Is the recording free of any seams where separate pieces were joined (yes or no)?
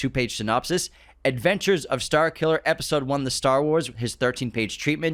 yes